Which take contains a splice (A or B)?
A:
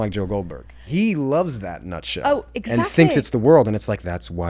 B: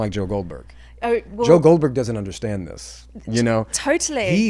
A